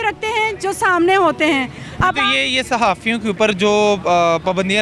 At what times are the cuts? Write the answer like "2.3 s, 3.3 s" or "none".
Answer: none